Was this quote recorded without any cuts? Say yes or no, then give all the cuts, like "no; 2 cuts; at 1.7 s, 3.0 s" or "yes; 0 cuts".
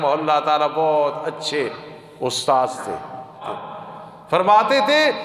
no; 1 cut; at 3.4 s